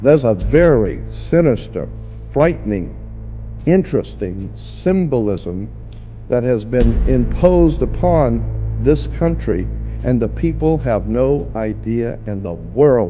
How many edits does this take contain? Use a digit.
0